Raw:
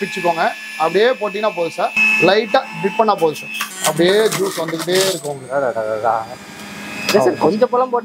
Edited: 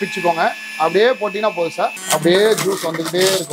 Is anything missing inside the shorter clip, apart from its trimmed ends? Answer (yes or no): yes